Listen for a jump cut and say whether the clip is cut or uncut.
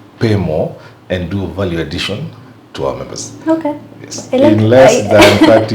uncut